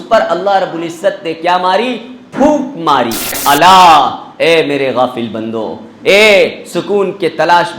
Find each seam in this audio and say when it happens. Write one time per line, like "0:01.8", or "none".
0:03.4